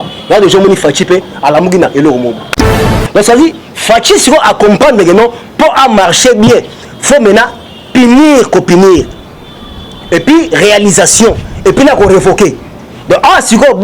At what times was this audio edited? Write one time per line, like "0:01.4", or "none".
0:02.9